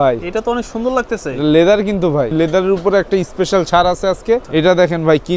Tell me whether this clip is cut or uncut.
cut